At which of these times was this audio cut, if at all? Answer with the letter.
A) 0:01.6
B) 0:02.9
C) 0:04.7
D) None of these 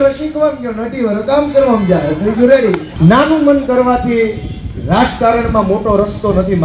B